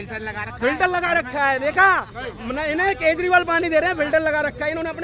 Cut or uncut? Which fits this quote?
uncut